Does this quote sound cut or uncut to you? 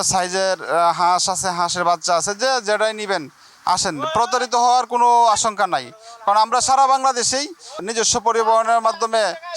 cut